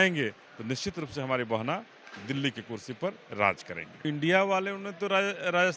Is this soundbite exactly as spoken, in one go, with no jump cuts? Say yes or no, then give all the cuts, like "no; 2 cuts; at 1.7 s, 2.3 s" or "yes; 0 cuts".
no; 1 cut; at 4.0 s